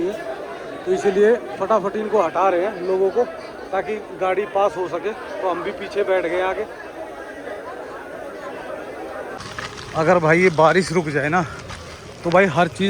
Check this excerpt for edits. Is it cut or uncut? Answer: cut